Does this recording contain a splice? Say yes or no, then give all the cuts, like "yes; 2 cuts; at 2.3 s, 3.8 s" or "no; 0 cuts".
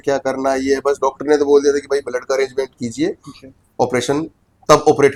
no; 0 cuts